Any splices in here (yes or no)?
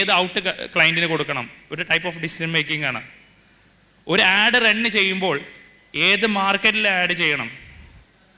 no